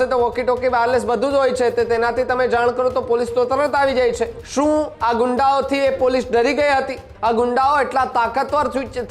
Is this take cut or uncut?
cut